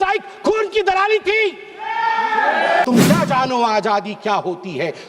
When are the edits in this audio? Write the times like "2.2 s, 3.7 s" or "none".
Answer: 2.8 s